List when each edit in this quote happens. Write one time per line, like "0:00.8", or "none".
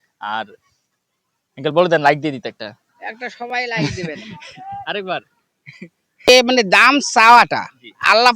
0:06.3